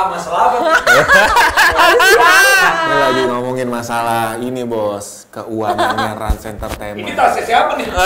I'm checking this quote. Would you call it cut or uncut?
uncut